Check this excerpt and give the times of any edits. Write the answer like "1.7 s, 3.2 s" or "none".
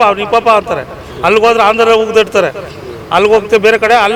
none